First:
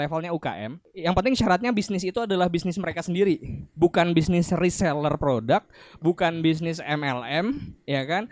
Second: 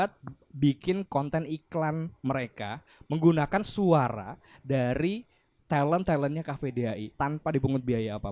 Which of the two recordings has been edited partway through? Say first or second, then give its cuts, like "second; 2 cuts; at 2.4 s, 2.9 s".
second; 1 cut; at 7.1 s